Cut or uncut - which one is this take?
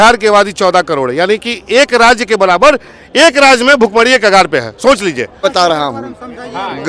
cut